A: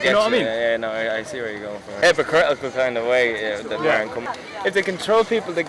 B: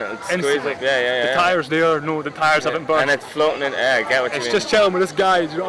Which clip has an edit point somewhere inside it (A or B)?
A